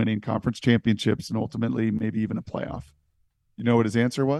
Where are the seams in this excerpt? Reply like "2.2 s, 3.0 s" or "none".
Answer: none